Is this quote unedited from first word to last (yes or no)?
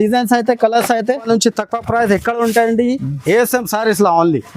no